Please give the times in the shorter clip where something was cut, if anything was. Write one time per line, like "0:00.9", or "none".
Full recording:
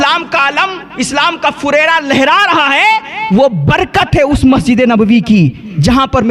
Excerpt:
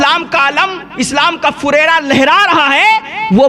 none